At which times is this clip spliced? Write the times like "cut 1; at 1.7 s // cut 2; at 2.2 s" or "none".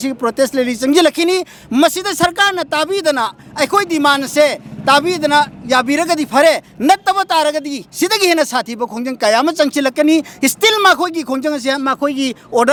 none